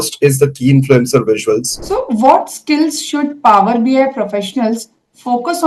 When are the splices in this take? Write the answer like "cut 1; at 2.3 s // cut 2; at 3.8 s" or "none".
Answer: cut 1; at 1.8 s

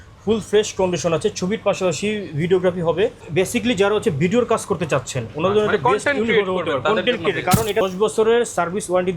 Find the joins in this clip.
cut 1; at 3.2 s // cut 2; at 7.8 s

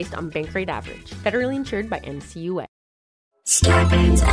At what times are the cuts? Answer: cut 1; at 2.7 s

